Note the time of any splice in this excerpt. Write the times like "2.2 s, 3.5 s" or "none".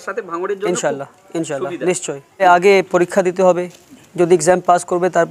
2.4 s